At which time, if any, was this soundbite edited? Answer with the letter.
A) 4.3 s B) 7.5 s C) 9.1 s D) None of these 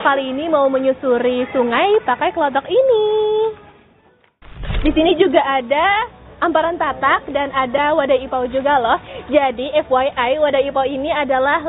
A